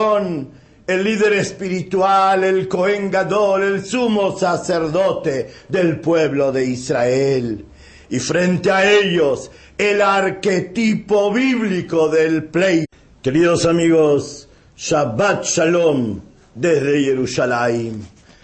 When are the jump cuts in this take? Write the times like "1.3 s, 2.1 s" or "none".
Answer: none